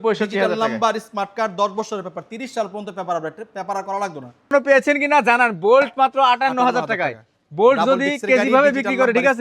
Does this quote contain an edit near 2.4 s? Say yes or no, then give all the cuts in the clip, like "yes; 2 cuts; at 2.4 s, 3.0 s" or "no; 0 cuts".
no; 1 cut; at 4.5 s